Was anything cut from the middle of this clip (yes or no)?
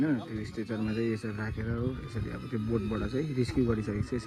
no